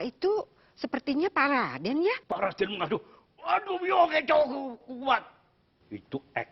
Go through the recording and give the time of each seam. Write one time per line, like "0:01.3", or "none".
0:02.3